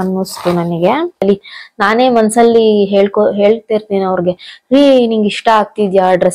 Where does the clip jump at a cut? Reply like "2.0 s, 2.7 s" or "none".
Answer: 1.2 s